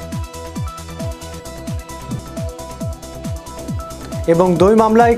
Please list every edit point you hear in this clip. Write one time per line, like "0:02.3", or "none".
none